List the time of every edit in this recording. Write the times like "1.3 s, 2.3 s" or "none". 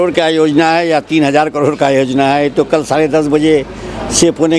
none